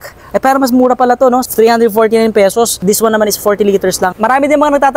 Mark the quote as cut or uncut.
cut